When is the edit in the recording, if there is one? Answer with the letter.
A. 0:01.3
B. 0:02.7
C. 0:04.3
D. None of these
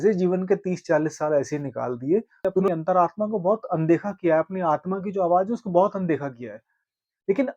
B